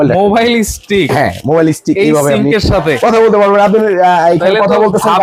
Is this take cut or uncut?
uncut